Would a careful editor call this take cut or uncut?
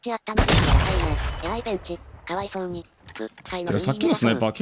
cut